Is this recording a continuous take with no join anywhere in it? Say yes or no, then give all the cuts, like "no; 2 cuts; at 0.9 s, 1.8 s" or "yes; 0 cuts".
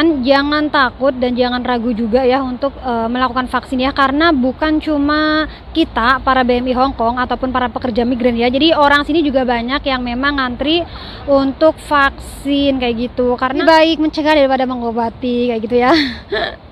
no; 1 cut; at 13.6 s